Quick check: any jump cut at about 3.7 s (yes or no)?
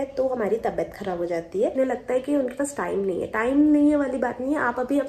no